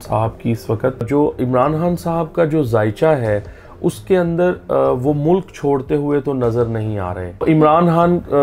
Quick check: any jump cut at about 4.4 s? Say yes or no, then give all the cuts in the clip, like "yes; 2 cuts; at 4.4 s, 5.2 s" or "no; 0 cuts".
no; 2 cuts; at 1.1 s, 7.4 s